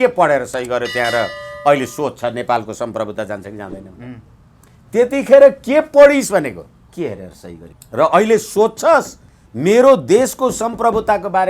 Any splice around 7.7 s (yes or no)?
yes